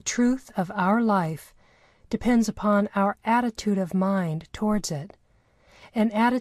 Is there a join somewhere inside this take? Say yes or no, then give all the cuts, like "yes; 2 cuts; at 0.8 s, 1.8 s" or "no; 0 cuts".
no; 0 cuts